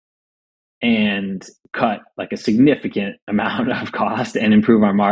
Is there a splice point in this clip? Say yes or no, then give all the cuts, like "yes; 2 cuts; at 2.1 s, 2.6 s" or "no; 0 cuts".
no; 0 cuts